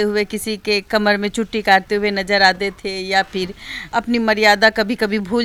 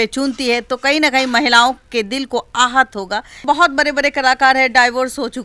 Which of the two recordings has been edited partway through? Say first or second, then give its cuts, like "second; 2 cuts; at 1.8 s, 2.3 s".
second; 1 cut; at 3.4 s